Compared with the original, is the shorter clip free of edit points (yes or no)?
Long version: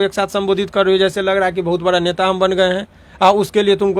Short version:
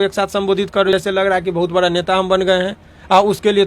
no